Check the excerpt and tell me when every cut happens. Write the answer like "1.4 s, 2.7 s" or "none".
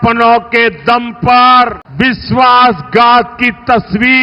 1.8 s